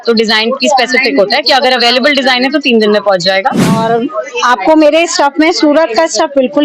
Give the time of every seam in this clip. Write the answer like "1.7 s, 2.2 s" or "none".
3.8 s